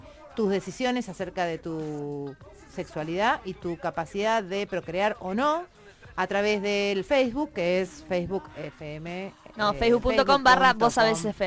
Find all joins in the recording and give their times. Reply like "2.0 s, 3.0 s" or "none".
10.5 s